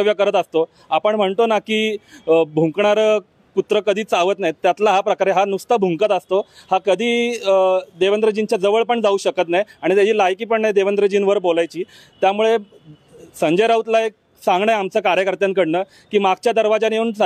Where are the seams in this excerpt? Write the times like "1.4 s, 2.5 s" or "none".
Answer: none